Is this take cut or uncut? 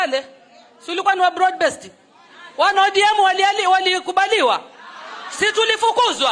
uncut